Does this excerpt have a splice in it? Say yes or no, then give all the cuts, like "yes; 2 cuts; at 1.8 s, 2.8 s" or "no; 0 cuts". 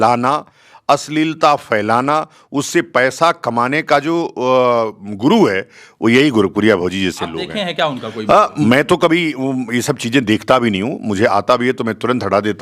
yes; 1 cut; at 8.5 s